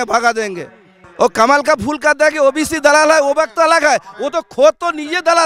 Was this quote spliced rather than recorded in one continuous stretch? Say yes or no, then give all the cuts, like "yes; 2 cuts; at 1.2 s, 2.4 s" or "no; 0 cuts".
yes; 1 cut; at 1.0 s